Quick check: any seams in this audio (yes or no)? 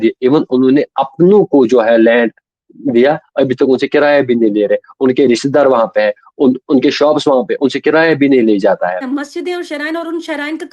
yes